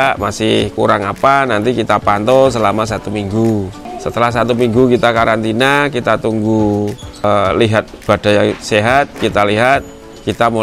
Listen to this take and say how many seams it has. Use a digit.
1